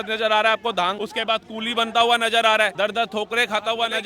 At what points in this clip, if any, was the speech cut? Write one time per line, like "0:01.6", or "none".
0:01.0
0:02.7